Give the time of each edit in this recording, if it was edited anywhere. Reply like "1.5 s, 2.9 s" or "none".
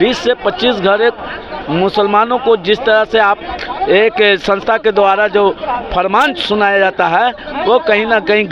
none